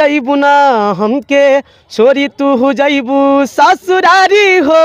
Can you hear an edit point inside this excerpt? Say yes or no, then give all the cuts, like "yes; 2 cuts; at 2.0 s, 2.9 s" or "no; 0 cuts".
no; 0 cuts